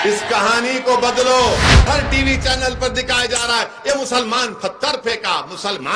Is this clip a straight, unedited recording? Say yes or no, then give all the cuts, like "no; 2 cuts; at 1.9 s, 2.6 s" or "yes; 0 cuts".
no; 1 cut; at 1.8 s